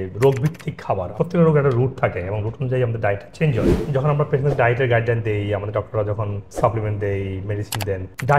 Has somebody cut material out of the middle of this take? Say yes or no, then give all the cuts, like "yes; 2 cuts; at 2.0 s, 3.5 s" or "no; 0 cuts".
yes; 2 cuts; at 1.1 s, 3.8 s